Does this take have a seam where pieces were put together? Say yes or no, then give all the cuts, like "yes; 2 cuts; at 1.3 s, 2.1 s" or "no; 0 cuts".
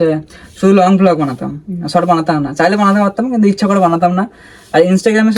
no; 0 cuts